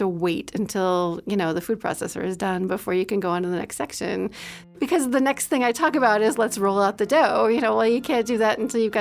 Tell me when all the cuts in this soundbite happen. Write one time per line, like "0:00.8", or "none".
0:04.6